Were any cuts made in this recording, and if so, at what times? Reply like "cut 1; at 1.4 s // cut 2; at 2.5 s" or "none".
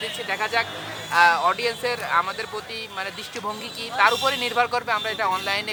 none